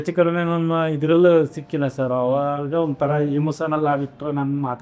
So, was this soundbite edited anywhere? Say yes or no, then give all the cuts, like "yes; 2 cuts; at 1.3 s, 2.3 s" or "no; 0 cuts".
no; 0 cuts